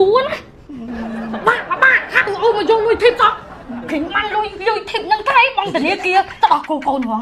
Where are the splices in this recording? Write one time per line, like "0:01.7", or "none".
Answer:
none